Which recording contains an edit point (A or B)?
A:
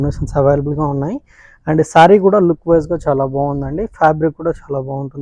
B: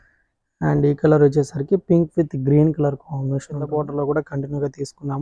B